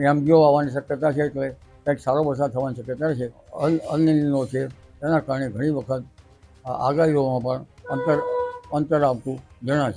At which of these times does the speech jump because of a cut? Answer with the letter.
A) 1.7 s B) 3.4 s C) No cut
B